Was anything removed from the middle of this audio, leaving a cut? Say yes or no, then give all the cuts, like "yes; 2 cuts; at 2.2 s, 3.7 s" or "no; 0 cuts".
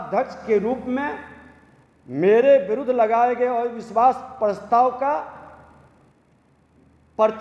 no; 0 cuts